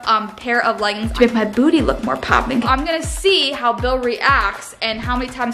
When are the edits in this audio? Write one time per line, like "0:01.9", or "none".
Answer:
0:01.1
0:02.6